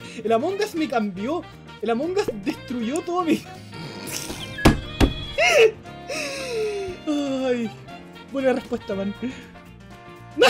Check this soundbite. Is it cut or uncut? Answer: uncut